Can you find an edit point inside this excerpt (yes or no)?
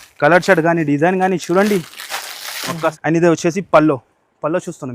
yes